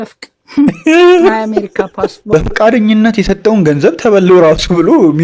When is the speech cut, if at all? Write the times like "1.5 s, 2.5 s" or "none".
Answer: 2.2 s